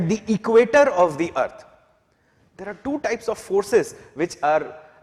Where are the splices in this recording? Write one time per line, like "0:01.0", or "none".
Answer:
none